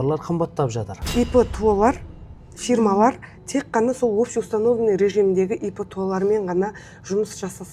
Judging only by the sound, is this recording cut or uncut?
cut